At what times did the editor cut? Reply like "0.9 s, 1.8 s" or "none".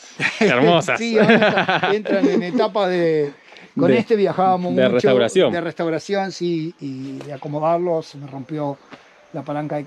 none